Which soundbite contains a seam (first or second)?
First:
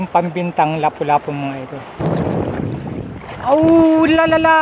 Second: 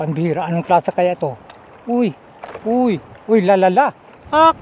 first